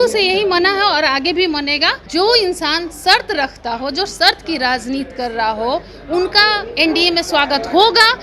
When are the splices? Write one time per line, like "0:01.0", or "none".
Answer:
0:02.0

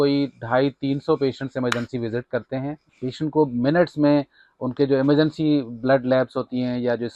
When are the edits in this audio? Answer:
0:02.8

